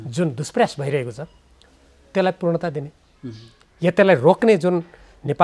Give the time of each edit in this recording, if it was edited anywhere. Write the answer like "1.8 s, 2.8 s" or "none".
none